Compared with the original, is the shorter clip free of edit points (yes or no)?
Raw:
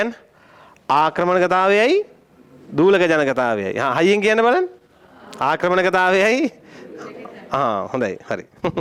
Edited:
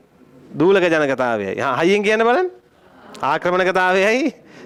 yes